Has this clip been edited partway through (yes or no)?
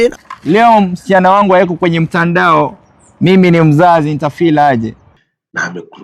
yes